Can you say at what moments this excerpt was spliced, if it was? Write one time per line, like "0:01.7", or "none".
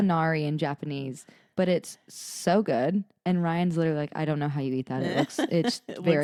none

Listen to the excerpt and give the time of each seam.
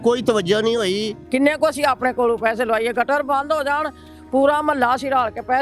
0:01.1

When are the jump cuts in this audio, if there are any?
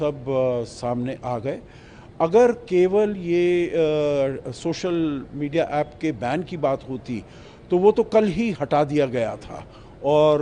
none

